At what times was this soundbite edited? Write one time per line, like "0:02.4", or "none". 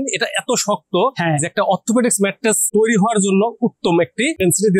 none